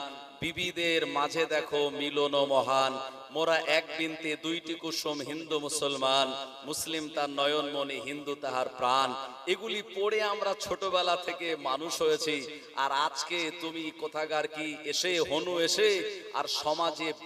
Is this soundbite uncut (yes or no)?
yes